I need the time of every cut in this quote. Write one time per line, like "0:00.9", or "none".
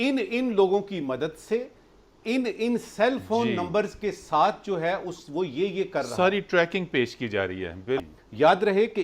0:08.1